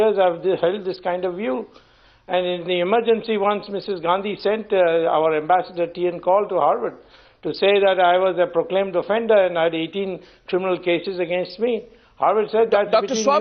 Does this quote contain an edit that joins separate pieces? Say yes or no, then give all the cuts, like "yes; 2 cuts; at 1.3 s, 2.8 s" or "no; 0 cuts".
yes; 1 cut; at 8.5 s